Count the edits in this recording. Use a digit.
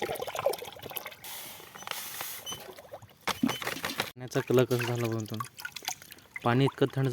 2